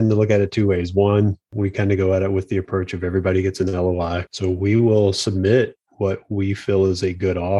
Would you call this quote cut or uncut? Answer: cut